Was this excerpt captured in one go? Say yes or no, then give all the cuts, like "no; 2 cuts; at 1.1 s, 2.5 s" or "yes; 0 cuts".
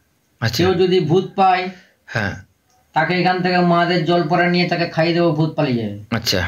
yes; 0 cuts